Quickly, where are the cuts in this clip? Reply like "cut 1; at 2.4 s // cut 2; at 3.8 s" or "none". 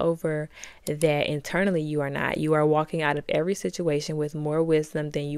none